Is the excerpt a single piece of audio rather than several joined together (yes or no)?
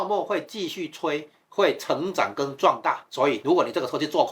no